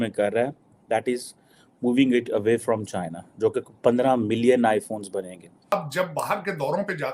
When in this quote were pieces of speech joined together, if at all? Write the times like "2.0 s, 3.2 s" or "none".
5.7 s